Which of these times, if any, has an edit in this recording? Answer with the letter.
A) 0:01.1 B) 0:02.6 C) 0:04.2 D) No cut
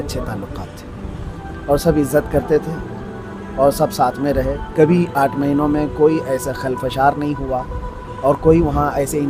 D